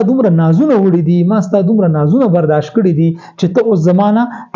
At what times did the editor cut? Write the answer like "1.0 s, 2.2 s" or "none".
none